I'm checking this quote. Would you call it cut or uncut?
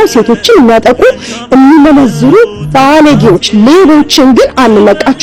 uncut